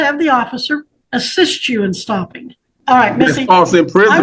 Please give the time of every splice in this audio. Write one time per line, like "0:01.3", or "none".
0:01.0
0:02.7